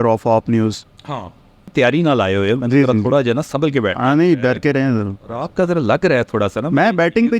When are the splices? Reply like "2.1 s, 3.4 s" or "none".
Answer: 1.7 s